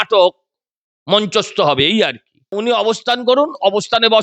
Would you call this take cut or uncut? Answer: cut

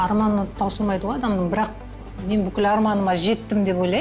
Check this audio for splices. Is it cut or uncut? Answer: uncut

